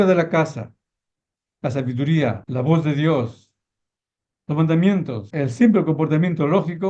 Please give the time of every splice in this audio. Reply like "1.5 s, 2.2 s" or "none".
2.4 s, 5.2 s

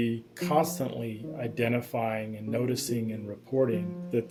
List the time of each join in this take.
none

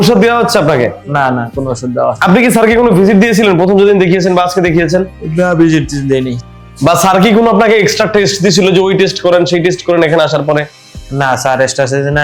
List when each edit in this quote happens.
none

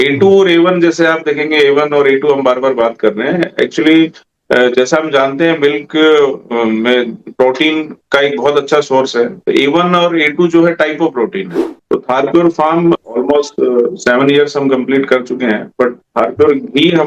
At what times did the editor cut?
11.5 s

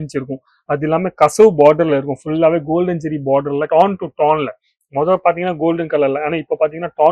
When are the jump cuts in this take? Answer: none

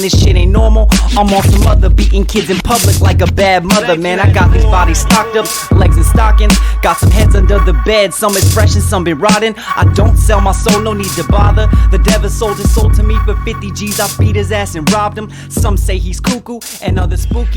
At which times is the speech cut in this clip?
none

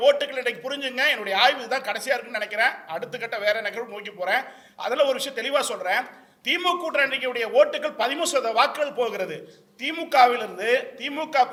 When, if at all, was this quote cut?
none

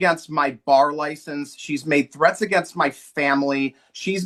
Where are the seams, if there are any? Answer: none

